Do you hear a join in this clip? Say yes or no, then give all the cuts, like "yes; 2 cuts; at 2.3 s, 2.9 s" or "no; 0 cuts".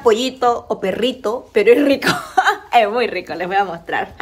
no; 0 cuts